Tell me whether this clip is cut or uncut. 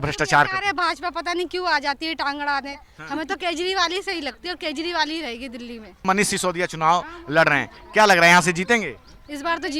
cut